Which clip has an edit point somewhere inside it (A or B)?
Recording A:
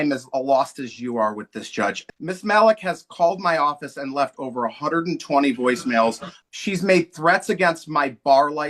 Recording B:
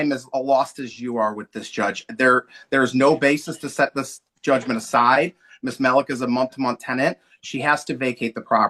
A